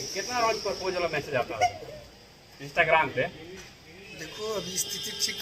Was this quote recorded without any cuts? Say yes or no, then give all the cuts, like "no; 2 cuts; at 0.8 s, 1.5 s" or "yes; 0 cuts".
yes; 0 cuts